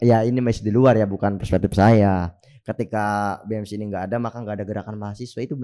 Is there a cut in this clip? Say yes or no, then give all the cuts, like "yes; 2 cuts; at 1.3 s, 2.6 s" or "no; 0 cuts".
no; 0 cuts